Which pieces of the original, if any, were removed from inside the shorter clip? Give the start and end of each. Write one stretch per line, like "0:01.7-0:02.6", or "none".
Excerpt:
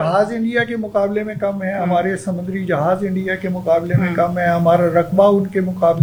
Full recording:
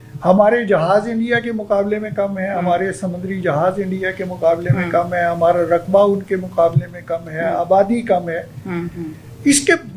none